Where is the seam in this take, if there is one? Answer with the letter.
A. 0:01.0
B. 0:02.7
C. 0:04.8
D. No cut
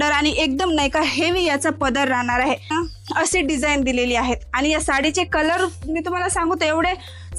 B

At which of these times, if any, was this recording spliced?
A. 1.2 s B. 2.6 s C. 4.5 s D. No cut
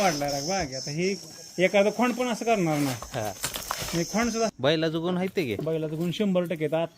C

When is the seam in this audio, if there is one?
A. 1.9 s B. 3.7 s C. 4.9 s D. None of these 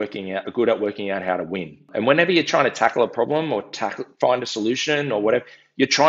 A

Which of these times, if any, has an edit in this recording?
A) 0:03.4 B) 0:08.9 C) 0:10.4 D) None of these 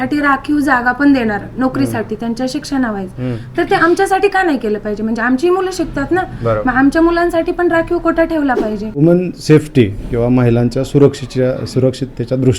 B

